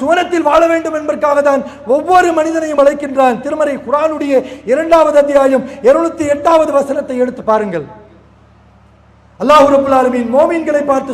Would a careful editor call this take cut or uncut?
uncut